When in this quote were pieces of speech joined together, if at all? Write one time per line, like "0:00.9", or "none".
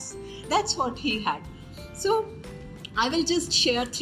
none